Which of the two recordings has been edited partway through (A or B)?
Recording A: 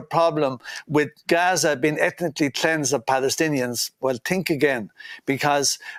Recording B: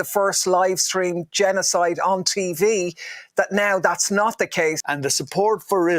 B